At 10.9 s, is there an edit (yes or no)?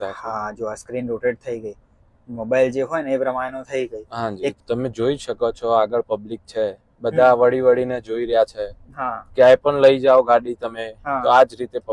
no